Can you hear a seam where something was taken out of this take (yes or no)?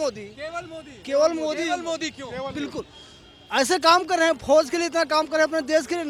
no